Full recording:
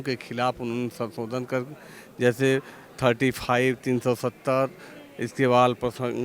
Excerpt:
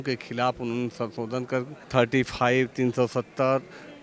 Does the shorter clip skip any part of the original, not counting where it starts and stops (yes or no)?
yes